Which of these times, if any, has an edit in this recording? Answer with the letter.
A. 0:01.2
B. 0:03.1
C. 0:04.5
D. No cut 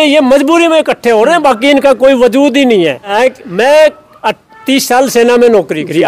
B